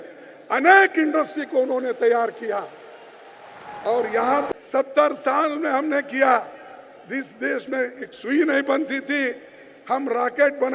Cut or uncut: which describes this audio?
cut